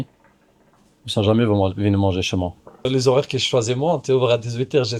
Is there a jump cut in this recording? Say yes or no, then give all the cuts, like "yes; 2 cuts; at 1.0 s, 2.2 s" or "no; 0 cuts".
yes; 1 cut; at 2.9 s